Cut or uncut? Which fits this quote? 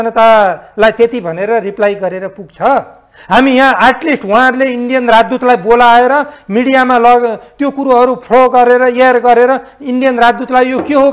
uncut